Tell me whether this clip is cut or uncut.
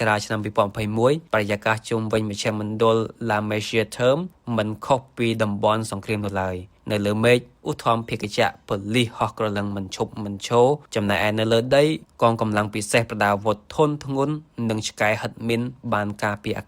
cut